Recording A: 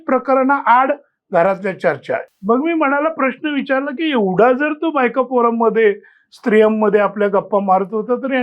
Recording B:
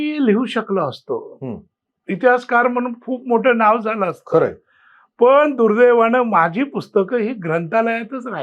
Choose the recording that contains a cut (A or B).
A